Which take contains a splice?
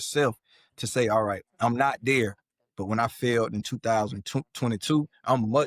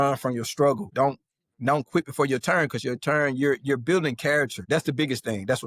second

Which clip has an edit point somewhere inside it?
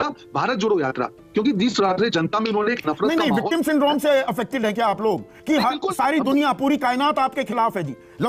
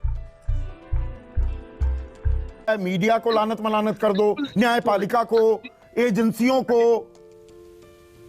second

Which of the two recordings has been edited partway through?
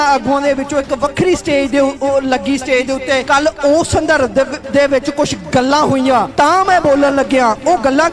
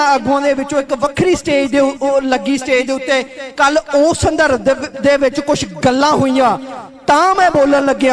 first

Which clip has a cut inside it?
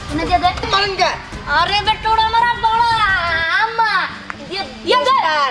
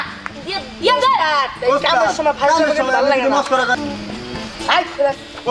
second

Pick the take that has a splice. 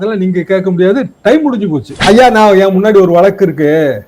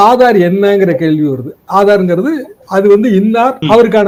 first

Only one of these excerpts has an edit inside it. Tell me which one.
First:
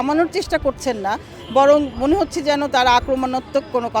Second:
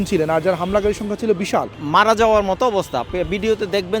second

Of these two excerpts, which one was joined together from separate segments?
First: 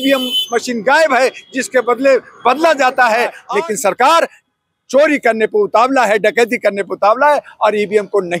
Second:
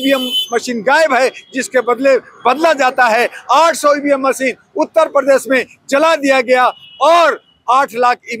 first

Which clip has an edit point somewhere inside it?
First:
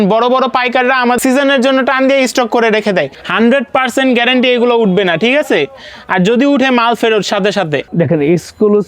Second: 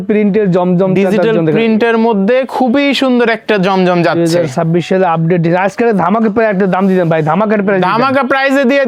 first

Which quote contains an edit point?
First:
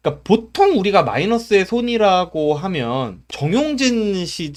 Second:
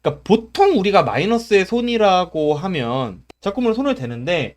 second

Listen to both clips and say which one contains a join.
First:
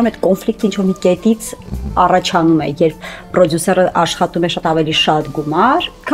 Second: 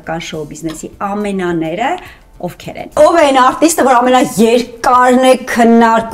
second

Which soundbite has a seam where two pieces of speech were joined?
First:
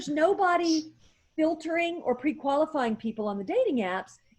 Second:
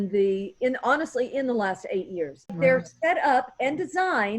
second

